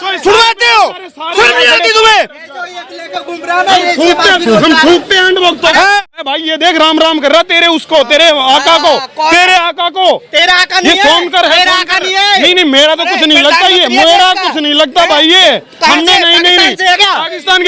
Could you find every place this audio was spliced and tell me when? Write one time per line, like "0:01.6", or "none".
0:06.2